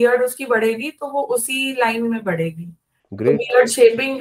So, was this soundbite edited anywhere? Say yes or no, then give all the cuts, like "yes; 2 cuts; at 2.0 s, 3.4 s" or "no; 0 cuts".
no; 0 cuts